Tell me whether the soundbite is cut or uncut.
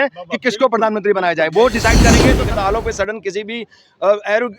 cut